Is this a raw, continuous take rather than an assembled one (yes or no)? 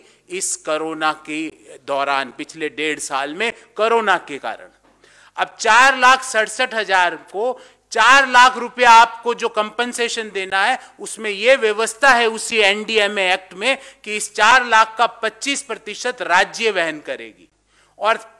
yes